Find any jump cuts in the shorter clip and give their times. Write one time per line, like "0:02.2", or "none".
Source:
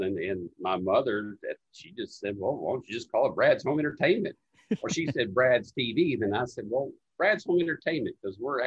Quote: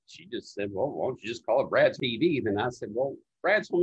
0:02.0